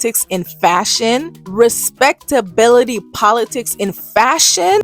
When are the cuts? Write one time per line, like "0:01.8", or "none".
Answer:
0:01.4